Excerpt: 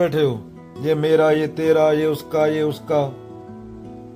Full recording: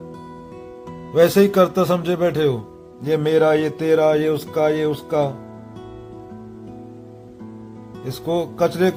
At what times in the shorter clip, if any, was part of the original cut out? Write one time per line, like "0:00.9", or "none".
0:03.1